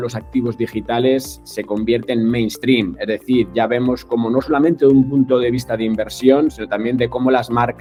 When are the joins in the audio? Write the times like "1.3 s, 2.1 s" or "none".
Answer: none